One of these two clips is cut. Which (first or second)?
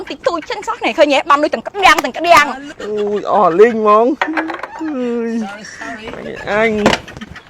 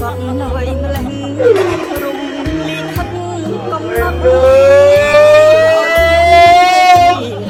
first